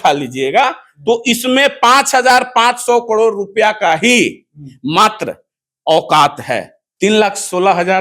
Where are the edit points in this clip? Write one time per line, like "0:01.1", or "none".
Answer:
0:06.8

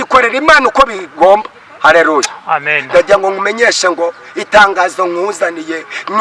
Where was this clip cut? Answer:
none

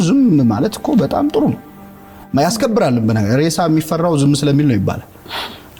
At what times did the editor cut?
none

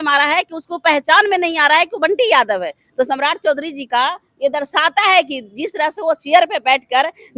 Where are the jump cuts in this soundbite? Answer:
none

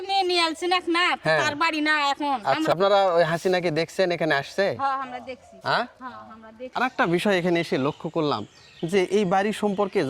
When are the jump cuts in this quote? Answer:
0:02.7
0:06.6

